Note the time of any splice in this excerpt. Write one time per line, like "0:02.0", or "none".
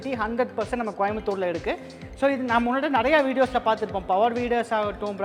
none